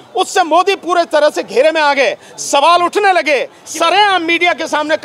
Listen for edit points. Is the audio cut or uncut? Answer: cut